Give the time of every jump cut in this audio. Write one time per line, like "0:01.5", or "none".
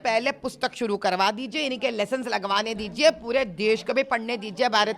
none